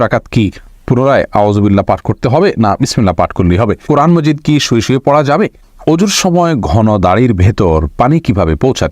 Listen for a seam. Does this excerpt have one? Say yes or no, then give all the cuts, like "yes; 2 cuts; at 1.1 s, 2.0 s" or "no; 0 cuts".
yes; 2 cuts; at 3.8 s, 5.7 s